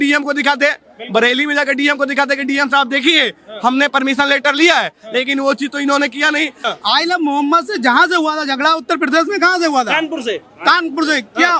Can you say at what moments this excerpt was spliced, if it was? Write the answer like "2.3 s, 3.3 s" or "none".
6.6 s